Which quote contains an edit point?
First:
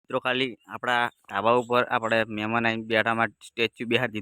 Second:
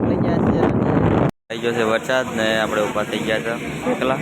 second; 1 cut; at 1.3 s

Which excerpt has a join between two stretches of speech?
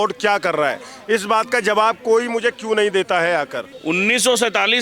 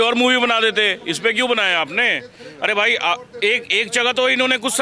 first; 1 cut; at 3.7 s

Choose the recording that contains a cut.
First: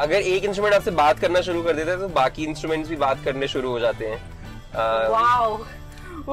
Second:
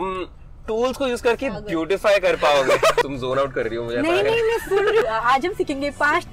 second; 2 cuts; at 3.0 s, 5.0 s

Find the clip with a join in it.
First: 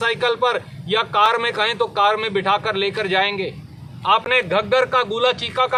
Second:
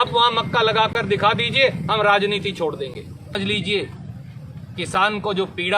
second; 1 cut; at 3.4 s

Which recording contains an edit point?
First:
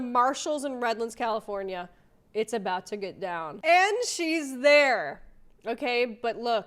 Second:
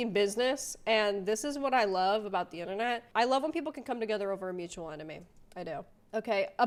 first; 1 cut; at 3.5 s

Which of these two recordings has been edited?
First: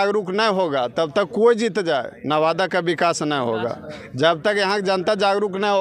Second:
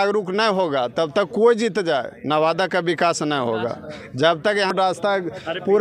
second; 1 cut; at 4.7 s

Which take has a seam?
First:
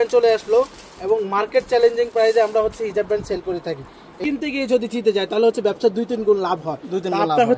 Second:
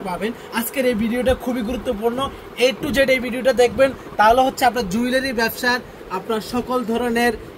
first; 1 cut; at 4.1 s

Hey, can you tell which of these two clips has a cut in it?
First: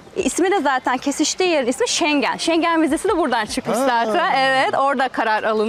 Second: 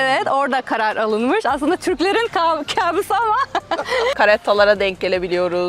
second; 1 cut; at 4.1 s

